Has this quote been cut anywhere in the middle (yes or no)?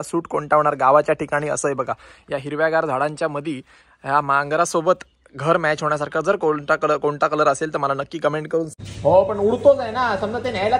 yes